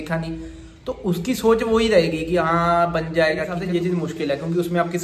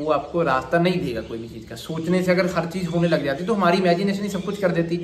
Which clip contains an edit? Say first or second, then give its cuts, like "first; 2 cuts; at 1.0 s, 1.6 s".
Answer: first; 1 cut; at 3.6 s